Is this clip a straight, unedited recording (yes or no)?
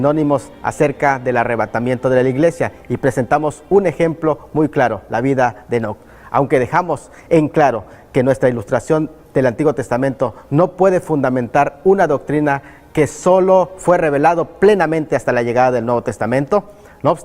no